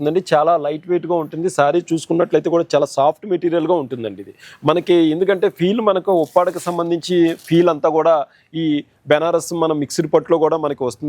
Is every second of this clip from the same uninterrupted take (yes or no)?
yes